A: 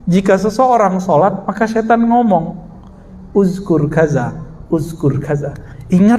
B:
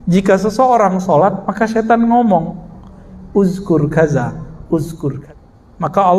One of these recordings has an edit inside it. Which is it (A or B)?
B